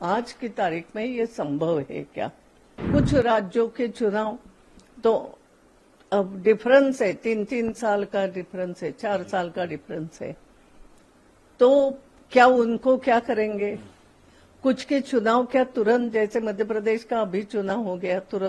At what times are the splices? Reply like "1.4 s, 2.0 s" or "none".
2.8 s